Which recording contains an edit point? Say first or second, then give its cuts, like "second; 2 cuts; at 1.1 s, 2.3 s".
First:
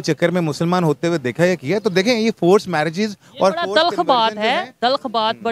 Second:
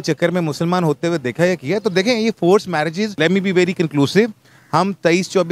second; 1 cut; at 3.1 s